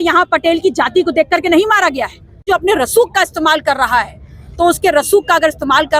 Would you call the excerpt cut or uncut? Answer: cut